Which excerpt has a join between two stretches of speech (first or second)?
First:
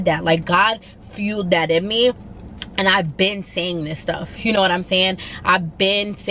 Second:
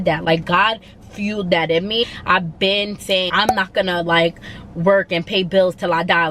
second